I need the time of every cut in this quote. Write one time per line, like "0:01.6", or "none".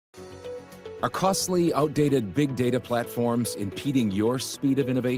none